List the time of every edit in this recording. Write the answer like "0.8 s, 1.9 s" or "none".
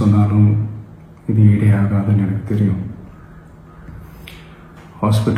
none